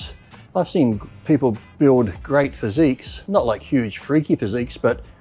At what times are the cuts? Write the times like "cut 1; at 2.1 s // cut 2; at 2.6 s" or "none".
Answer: none